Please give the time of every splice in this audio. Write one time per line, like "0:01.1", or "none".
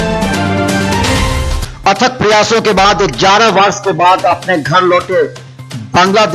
0:01.2